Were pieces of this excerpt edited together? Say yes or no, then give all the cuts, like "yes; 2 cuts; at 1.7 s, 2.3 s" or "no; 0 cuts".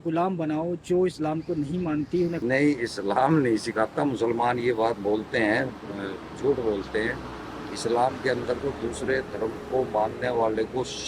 yes; 1 cut; at 2.4 s